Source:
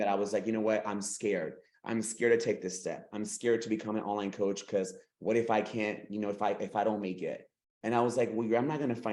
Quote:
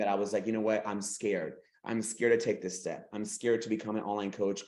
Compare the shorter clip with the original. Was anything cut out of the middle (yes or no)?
no